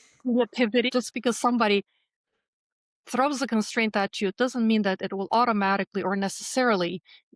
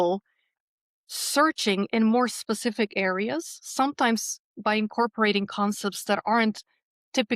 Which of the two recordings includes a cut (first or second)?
first